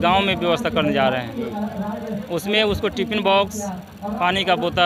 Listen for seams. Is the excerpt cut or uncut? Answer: uncut